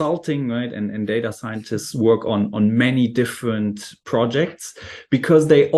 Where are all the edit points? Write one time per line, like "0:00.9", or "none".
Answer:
none